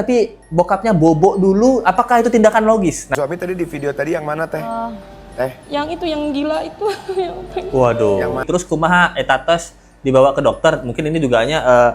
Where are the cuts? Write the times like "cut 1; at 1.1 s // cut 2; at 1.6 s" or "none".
cut 1; at 3.1 s // cut 2; at 8.4 s